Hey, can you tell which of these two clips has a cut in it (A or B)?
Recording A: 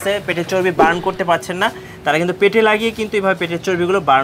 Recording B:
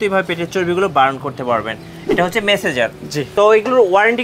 B